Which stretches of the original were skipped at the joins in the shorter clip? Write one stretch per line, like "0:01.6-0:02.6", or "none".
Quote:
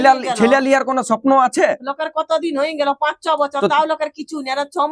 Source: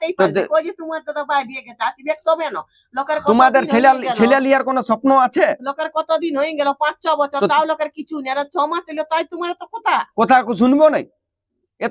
none